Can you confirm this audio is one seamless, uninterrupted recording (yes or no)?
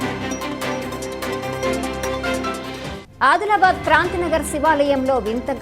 no